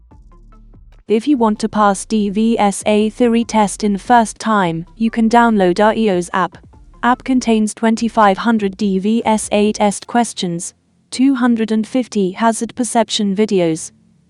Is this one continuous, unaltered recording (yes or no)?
no